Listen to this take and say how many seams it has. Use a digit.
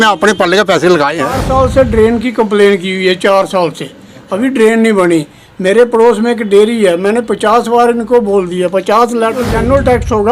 2